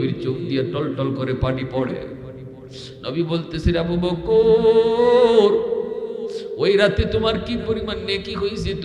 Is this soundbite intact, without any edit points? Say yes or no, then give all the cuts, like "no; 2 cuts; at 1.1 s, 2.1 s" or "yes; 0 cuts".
yes; 0 cuts